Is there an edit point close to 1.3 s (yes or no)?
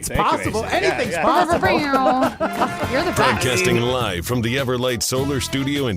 no